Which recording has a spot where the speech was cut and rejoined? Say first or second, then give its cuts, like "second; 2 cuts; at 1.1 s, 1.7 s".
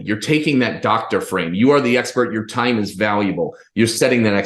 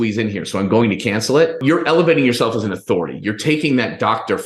second; 1 cut; at 1.6 s